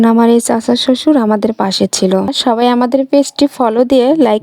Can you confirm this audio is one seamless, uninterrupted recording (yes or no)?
no